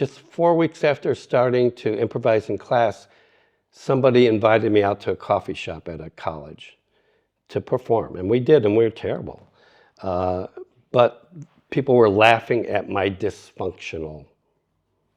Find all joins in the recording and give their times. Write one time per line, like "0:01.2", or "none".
none

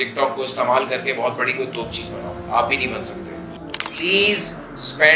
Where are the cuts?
0:03.5

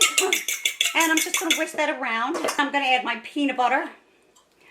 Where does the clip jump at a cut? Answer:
0:02.6

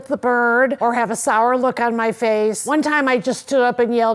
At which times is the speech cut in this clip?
0:00.8
0:02.6

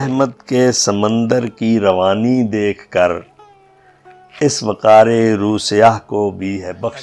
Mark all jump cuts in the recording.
none

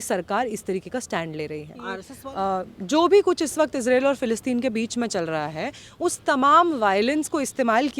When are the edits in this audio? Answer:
0:02.1

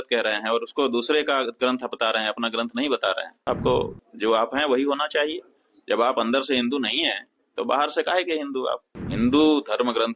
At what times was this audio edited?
0:03.4
0:08.9

